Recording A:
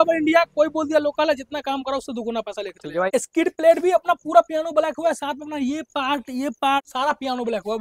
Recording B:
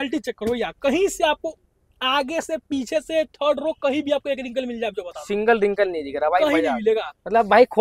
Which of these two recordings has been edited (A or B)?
A